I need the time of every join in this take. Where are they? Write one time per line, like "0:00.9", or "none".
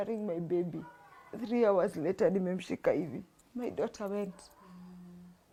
none